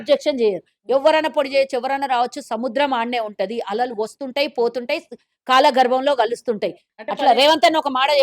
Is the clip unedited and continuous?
no; 1 cut; at 6.9 s

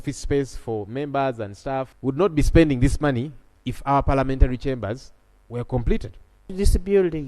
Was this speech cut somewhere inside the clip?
yes; 2 cuts; at 1.9 s, 6.5 s

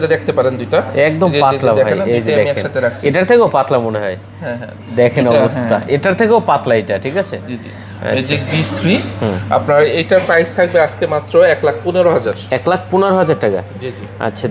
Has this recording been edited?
no; 0 cuts

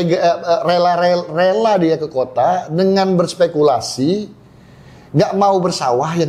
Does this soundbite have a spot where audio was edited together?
no; 0 cuts

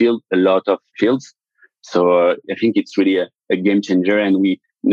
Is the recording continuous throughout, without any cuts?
no; 2 cuts; at 1.4 s, 2.4 s

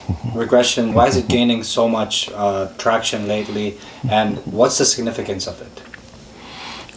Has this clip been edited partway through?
yes; 1 cut; at 0.9 s

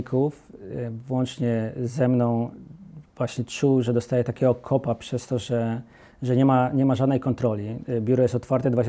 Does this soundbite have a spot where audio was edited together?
no; 0 cuts

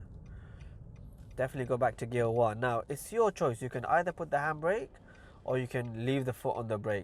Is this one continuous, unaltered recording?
yes; 0 cuts

